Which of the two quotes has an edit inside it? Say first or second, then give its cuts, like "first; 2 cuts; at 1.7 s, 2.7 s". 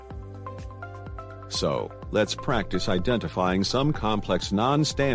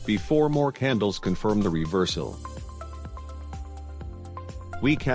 first; 1 cut; at 1.6 s